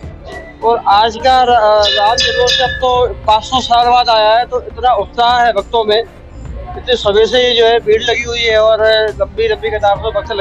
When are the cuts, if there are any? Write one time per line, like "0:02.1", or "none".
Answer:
none